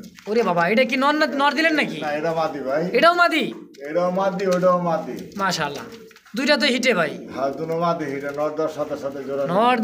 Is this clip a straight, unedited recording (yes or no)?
yes